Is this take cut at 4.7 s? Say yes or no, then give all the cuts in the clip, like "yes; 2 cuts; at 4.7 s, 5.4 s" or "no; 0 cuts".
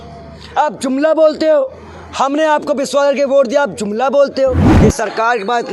yes; 1 cut; at 4.7 s